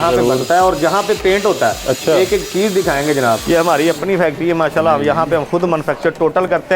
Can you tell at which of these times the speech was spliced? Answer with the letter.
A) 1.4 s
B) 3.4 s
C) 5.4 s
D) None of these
B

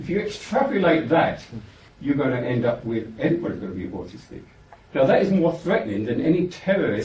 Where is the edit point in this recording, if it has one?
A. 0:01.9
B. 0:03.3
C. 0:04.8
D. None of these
A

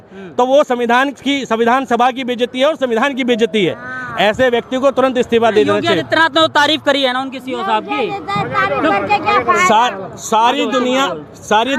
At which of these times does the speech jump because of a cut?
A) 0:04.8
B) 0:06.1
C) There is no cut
C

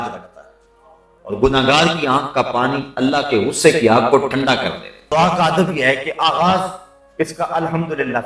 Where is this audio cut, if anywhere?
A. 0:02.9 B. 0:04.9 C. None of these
B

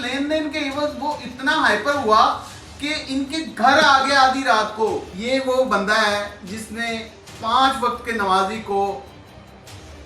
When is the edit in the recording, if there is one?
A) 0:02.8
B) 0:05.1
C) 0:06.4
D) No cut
B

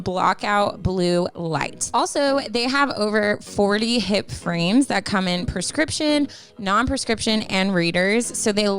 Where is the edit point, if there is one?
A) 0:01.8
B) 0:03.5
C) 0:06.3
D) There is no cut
A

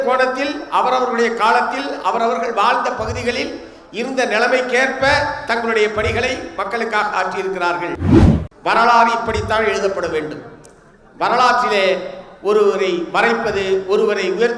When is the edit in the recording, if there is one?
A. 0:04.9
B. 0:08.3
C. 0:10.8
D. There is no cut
B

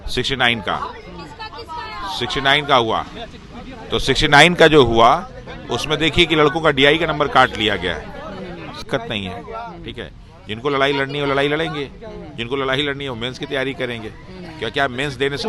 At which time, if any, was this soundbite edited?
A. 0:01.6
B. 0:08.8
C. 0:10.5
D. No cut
B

